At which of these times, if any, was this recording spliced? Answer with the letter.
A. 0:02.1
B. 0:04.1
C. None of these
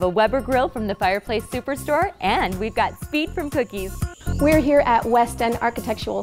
B